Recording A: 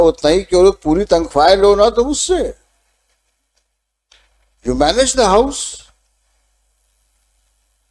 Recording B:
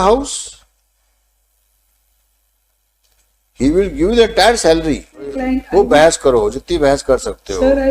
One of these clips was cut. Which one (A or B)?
B